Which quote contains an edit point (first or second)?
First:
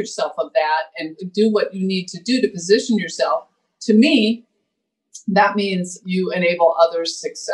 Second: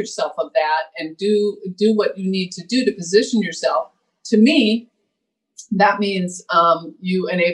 first